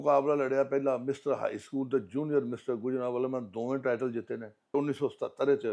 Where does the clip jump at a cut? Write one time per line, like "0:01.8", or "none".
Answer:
0:04.7